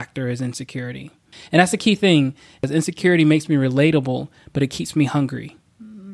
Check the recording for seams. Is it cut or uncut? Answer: cut